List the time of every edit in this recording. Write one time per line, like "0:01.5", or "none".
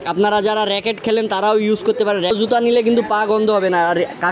0:02.3